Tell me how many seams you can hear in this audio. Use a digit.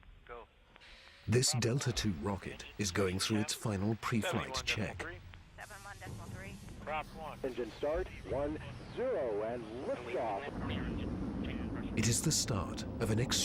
0